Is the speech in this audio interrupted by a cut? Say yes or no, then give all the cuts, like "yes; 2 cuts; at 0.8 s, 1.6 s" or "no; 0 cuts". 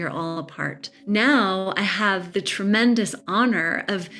yes; 2 cuts; at 0.9 s, 2.2 s